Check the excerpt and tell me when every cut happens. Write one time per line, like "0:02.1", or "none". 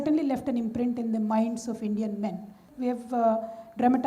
0:02.6